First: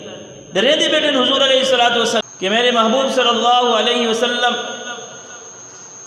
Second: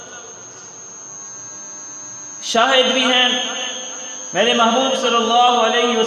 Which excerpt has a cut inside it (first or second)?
first